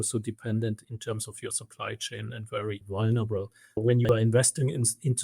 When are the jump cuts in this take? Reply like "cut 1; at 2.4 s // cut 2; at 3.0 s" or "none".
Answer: cut 1; at 0.9 s // cut 2; at 2.8 s // cut 3; at 3.8 s

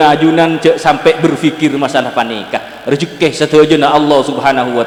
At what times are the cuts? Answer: none

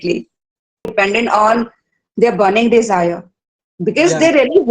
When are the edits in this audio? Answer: cut 1; at 0.9 s

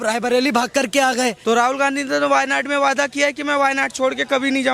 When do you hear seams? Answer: cut 1; at 1.4 s

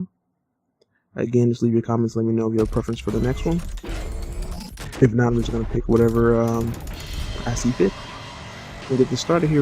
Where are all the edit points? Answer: cut 1; at 5.5 s

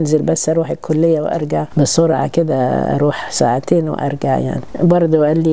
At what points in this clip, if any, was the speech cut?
cut 1; at 1.7 s // cut 2; at 4.6 s

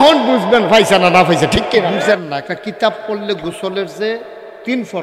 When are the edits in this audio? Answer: cut 1; at 2.1 s

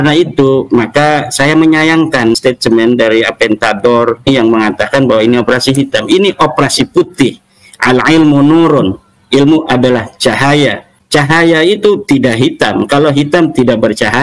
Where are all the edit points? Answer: cut 1; at 2.4 s // cut 2; at 4.3 s // cut 3; at 10.9 s

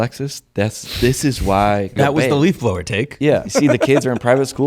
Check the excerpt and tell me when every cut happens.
cut 1; at 1.9 s // cut 2; at 3.6 s

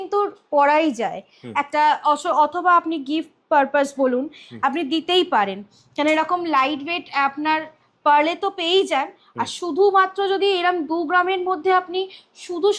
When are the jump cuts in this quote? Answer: none

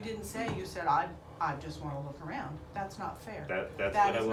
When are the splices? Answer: none

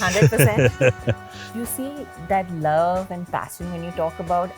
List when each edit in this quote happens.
cut 1; at 1.5 s

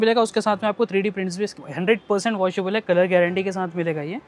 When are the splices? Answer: cut 1; at 1.6 s

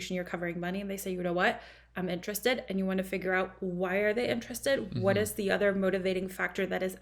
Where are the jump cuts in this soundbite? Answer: none

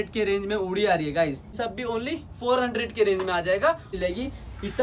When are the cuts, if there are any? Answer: cut 1; at 1.6 s // cut 2; at 3.9 s

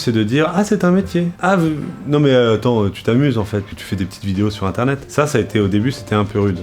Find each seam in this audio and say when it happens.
cut 1; at 1.3 s // cut 2; at 5.1 s

